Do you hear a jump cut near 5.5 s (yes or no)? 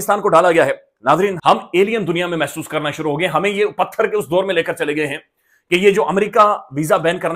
no